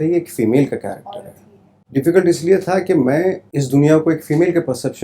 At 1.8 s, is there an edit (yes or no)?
yes